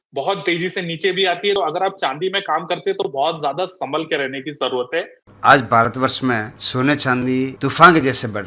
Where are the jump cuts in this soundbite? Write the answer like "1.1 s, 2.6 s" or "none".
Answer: 1.6 s, 5.2 s, 6.6 s, 7.5 s